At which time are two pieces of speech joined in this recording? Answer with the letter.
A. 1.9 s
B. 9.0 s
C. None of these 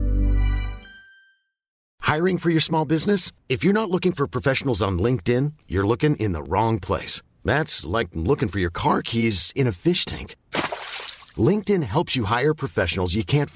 A